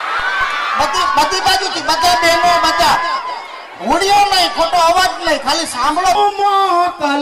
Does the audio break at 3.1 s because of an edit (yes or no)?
no